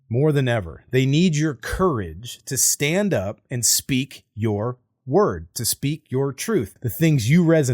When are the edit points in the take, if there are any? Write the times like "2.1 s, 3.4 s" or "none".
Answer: 6.8 s

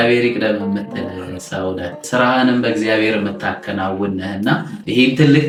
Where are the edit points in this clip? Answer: none

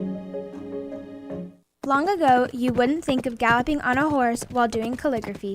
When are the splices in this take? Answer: 1.6 s

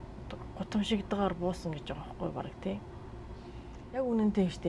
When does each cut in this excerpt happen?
3.7 s

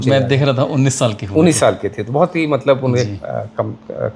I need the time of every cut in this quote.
none

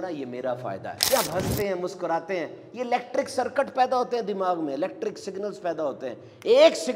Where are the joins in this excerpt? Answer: 0.9 s

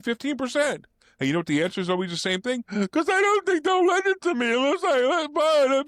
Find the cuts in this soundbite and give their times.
none

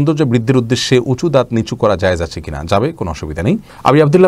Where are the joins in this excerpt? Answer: none

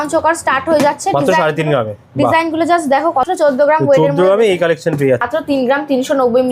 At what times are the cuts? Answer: 3.2 s, 5.2 s

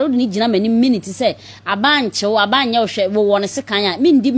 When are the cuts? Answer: none

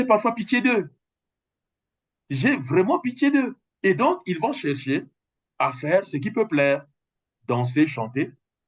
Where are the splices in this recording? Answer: none

